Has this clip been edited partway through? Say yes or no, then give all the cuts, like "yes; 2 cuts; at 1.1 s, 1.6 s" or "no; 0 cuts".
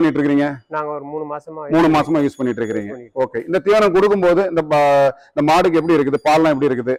no; 0 cuts